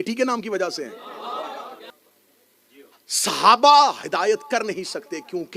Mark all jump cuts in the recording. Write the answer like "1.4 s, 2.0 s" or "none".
2.0 s